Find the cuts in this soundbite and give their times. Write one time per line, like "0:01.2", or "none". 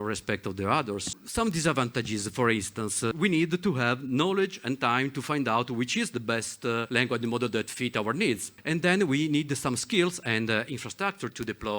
0:01.1
0:03.1
0:06.9
0:08.5